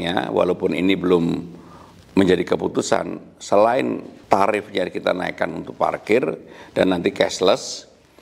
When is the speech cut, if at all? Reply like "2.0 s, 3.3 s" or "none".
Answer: 4.1 s